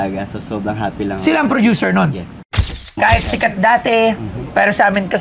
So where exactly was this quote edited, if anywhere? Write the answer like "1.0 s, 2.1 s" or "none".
2.8 s